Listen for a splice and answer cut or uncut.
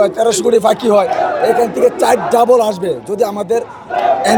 uncut